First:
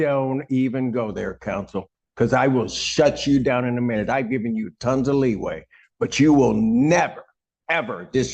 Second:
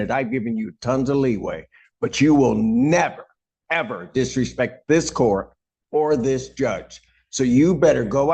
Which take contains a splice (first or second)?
first